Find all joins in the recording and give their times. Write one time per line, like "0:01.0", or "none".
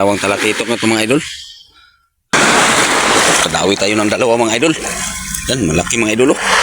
0:02.3